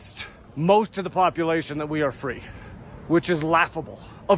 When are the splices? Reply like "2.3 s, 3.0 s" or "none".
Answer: none